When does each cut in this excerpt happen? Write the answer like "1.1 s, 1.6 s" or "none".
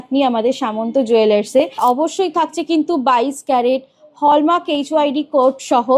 1.8 s